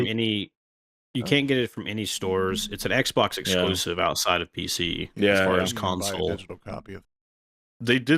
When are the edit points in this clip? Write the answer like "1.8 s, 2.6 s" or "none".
7.1 s